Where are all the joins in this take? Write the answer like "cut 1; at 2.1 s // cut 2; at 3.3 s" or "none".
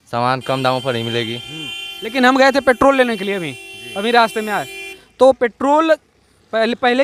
none